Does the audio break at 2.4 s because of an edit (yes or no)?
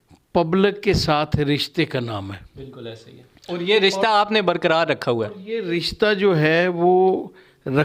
no